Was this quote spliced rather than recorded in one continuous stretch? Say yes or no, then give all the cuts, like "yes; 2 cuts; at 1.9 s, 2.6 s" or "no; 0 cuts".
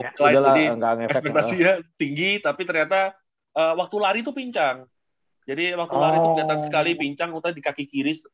no; 0 cuts